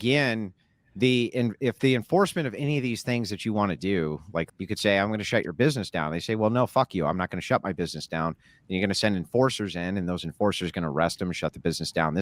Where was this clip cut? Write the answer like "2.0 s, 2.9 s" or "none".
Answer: 4.5 s